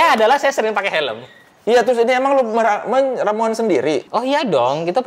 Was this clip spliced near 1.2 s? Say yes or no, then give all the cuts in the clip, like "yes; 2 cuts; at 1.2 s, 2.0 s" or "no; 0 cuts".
no; 1 cut; at 4.1 s